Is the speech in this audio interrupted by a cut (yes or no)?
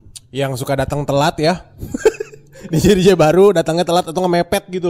no